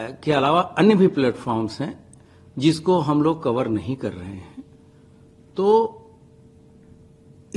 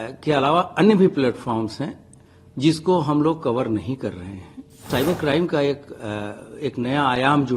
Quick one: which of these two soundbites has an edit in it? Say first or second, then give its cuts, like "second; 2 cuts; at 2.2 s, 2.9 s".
second; 1 cut; at 4.9 s